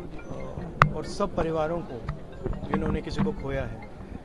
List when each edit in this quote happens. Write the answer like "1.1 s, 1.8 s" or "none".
none